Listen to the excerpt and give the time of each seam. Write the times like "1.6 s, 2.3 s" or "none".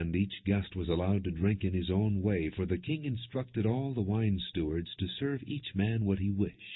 5.1 s